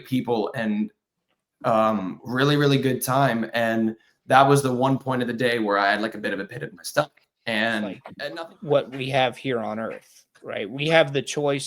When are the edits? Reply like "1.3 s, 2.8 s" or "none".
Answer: 8.1 s